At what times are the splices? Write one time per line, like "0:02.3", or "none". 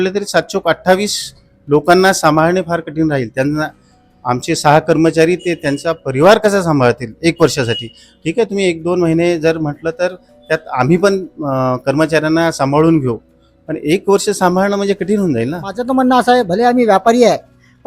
0:15.8